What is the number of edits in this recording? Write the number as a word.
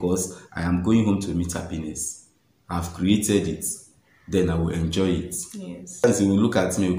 one